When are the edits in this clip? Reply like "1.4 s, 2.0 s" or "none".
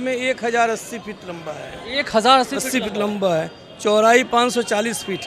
none